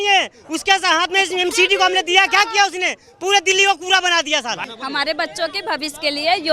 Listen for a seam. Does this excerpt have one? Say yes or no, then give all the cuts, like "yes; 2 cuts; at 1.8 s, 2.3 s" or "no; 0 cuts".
yes; 1 cut; at 4.7 s